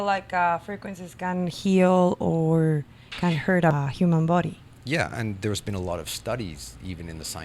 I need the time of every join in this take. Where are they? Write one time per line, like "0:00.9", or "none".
0:03.8